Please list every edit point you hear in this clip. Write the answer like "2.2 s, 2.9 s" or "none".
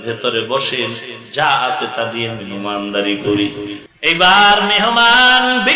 3.8 s